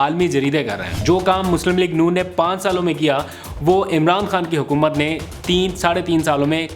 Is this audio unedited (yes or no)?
no